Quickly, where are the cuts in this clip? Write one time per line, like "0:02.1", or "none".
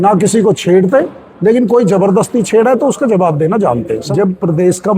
0:04.1